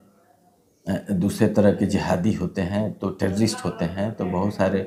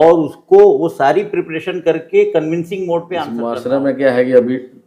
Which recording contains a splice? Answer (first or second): second